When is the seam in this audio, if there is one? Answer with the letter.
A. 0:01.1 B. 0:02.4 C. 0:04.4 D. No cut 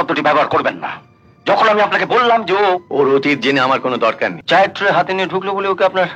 C